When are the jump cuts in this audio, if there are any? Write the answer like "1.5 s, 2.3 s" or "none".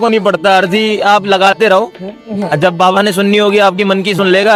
none